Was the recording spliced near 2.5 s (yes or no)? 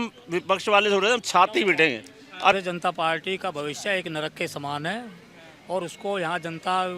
yes